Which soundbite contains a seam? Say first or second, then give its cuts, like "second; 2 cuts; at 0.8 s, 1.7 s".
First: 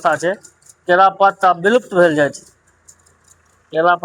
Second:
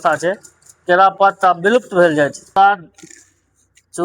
second; 1 cut; at 2.6 s